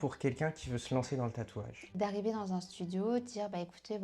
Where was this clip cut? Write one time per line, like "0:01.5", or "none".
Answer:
0:01.9